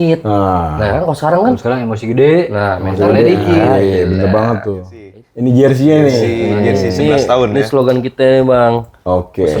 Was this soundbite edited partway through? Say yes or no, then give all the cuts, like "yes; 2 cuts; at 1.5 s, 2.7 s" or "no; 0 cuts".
yes; 1 cut; at 5.2 s